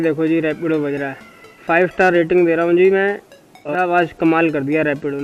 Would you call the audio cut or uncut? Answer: cut